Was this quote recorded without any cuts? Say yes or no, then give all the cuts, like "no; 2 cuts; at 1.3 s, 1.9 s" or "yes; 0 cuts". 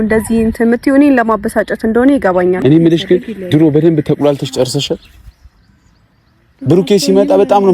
no; 1 cut; at 2.6 s